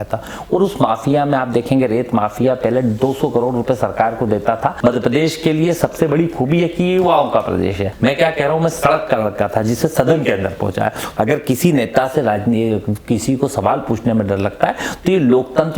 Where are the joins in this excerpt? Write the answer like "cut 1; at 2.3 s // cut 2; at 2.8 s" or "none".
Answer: cut 1; at 4.8 s // cut 2; at 7.9 s // cut 3; at 11.0 s